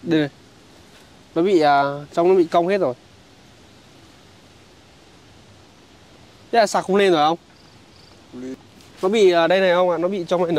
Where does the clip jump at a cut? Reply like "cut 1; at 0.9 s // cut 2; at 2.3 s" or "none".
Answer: cut 1; at 8.5 s